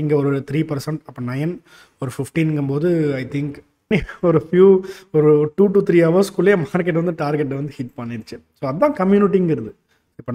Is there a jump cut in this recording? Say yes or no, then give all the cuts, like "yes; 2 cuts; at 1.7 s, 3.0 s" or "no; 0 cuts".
yes; 1 cut; at 3.9 s